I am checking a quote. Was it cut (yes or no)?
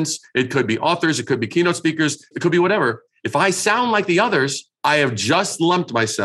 yes